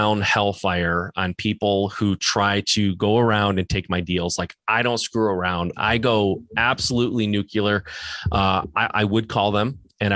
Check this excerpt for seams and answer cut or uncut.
uncut